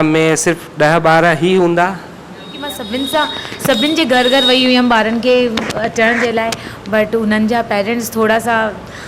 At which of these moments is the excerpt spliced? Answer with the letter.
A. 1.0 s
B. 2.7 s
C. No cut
B